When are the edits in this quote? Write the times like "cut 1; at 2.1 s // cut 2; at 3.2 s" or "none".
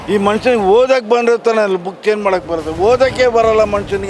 none